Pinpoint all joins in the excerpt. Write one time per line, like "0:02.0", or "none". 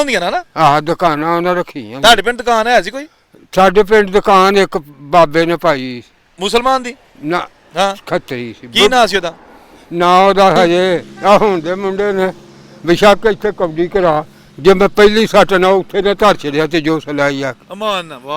0:11.1

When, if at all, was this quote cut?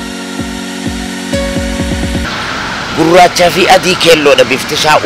0:02.3

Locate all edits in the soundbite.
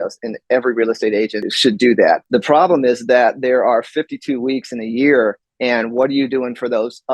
0:01.5
0:02.2

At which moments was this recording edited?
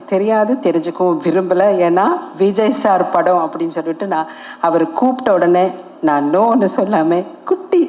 none

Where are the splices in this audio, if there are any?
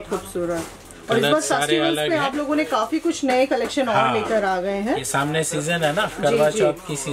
none

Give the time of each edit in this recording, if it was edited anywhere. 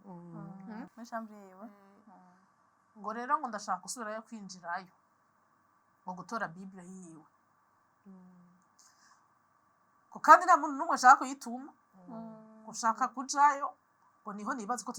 0:00.9

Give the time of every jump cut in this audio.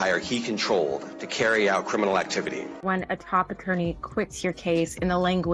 0:03.0

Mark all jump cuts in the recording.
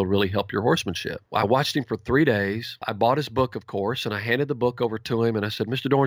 0:01.1
0:02.8

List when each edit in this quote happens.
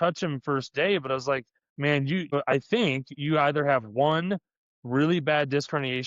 0:02.3

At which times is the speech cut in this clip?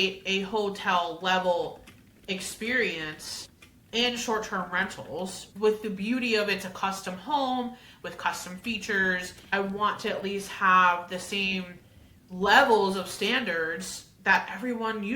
0:05.5
0:09.5

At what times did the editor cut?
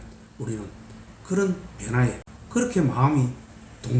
0:02.3

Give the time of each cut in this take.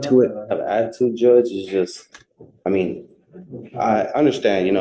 none

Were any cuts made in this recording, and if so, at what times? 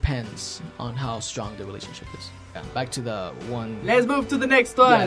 0:02.6

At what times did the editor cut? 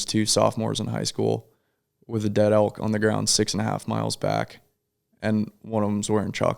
none

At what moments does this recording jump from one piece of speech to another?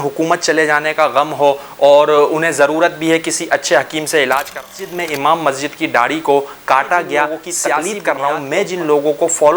0:04.7
0:07.8

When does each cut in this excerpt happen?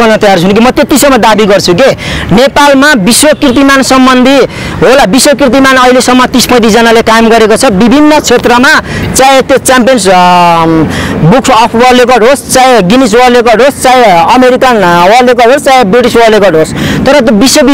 none

